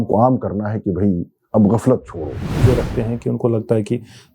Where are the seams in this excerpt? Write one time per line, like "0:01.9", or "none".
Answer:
0:02.6